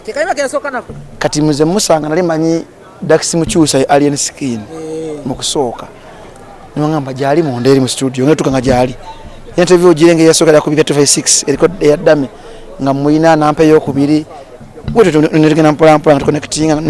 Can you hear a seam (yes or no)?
no